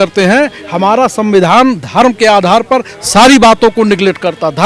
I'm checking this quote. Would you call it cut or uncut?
uncut